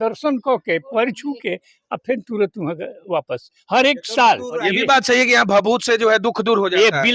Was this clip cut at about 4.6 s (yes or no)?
yes